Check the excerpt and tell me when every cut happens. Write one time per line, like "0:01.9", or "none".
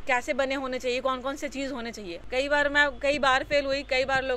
0:02.1